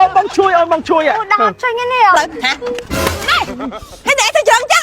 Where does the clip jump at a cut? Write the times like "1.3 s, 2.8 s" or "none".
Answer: 2.2 s

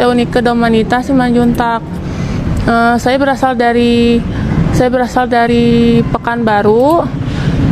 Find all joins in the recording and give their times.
none

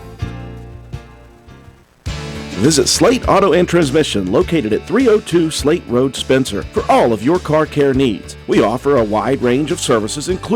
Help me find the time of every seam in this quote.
1.8 s

